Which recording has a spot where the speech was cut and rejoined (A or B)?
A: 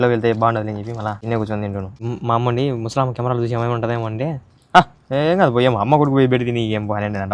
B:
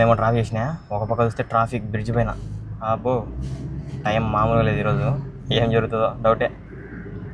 A